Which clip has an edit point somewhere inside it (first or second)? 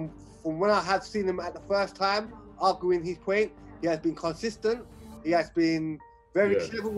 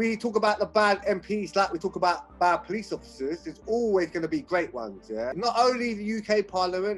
second